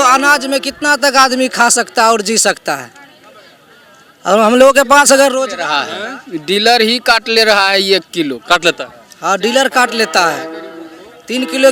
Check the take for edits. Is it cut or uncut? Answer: uncut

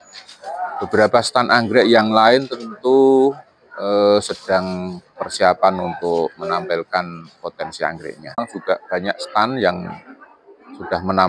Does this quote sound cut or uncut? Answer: cut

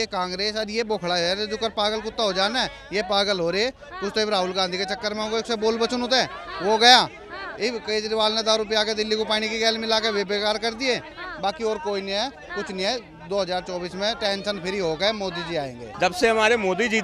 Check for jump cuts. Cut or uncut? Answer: cut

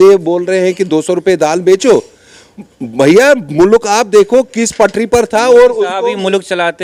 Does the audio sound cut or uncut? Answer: uncut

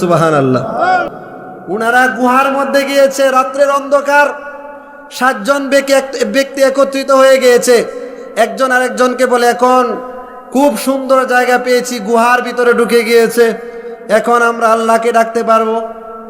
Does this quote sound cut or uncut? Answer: cut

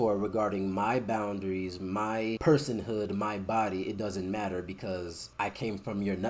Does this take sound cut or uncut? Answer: uncut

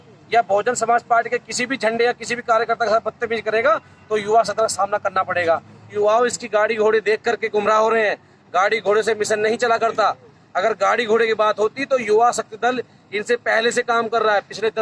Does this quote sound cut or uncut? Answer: cut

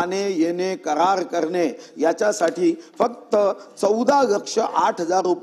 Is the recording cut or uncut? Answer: uncut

